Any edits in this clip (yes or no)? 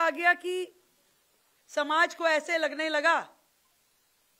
no